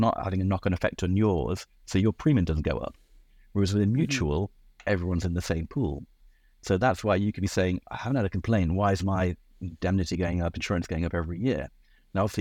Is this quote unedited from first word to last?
yes; 0 cuts

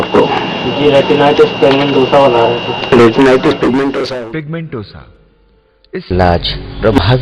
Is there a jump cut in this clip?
yes; 1 cut; at 4.0 s

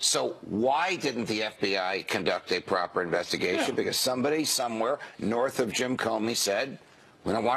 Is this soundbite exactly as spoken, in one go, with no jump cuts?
no; 1 cut; at 1.4 s

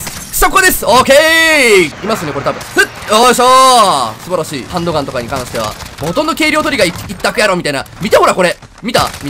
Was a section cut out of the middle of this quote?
yes; 2 cuts; at 1.9 s, 4.7 s

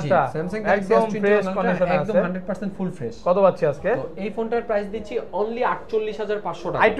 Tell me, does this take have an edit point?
no; 0 cuts

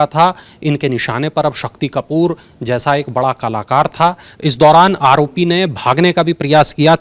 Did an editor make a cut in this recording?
yes; 1 cut; at 4.3 s

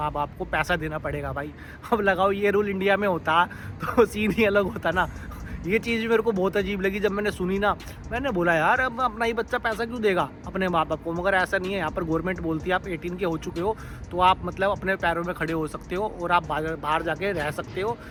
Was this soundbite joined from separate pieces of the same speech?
no; 0 cuts

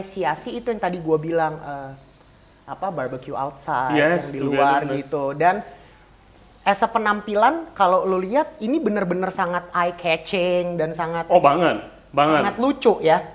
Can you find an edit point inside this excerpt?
no; 0 cuts

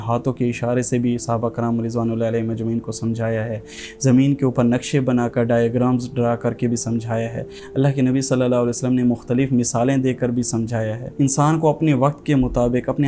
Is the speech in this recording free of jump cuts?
yes; 0 cuts

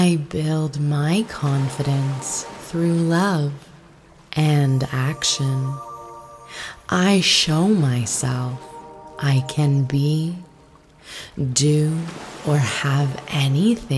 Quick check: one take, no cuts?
yes; 0 cuts

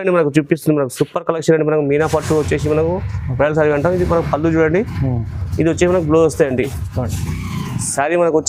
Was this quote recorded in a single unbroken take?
yes; 0 cuts

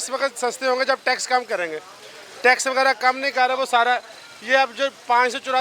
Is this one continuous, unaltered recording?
yes; 0 cuts

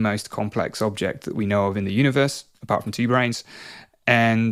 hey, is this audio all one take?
yes; 0 cuts

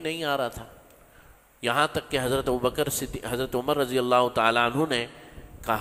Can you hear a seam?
no; 0 cuts

